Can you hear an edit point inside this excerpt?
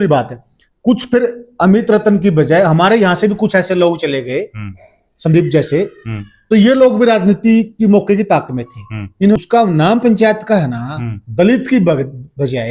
yes; 1 cut; at 9.4 s

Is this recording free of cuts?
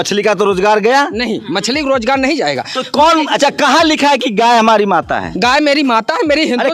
yes; 0 cuts

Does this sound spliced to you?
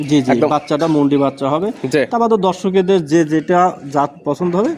no; 0 cuts

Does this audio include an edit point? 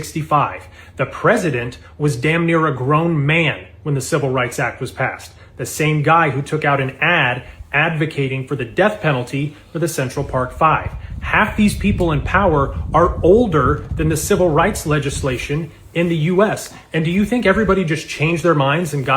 yes; 1 cut; at 16.3 s

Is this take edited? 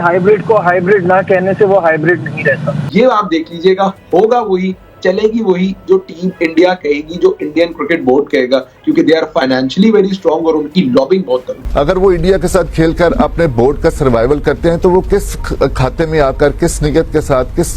yes; 2 cuts; at 2.8 s, 11.6 s

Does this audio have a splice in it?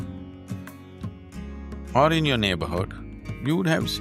yes; 1 cut; at 1.9 s

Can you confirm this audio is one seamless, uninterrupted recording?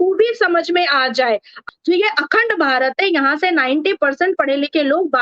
no; 1 cut; at 1.6 s

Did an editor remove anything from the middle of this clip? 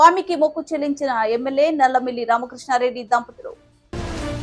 no; 0 cuts

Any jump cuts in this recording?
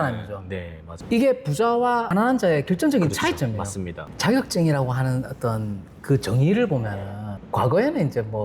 yes; 1 cut; at 3.9 s

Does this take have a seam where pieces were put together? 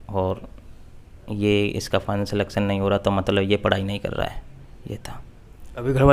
no; 0 cuts

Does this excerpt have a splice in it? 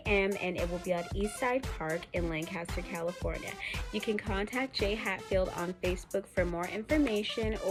no; 0 cuts

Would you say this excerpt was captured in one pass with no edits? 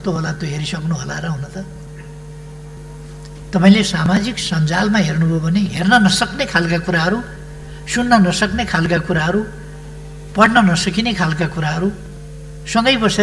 no; 1 cut; at 2.7 s

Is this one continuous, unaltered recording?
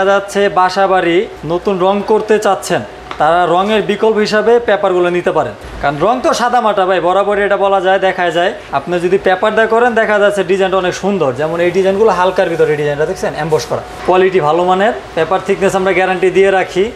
yes; 0 cuts

